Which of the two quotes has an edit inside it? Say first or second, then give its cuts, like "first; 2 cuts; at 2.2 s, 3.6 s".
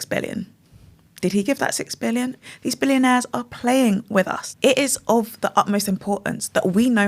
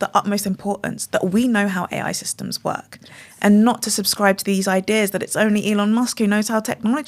first; 2 cuts; at 2.4 s, 4.4 s